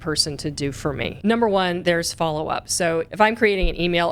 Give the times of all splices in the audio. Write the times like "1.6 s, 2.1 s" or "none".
1.1 s, 3.1 s